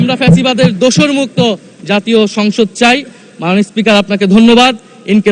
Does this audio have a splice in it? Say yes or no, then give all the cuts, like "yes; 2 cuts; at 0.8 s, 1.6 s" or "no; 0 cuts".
no; 0 cuts